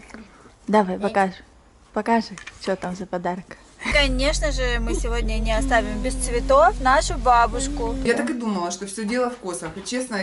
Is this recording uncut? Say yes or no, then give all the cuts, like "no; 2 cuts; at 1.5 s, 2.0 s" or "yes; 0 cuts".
no; 2 cuts; at 3.8 s, 8.0 s